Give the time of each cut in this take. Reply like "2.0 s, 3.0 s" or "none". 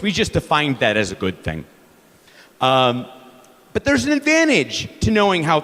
none